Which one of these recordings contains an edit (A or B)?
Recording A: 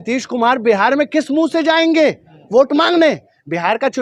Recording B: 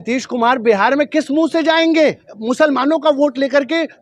B